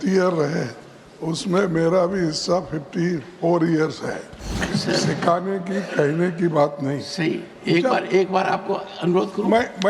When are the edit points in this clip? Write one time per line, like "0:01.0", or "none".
0:04.6